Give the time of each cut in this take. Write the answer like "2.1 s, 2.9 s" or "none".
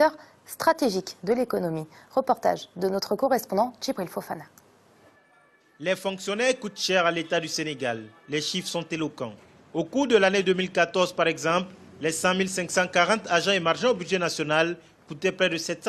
3.2 s